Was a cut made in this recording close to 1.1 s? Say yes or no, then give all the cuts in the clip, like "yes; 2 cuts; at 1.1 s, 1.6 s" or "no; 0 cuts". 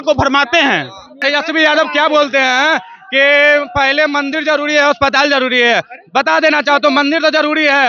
yes; 1 cut; at 1.1 s